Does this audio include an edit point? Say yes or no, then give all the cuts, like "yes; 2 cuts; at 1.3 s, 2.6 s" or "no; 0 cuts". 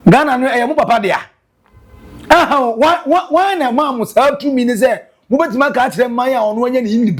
no; 0 cuts